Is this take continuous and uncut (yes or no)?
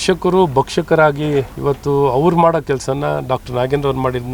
no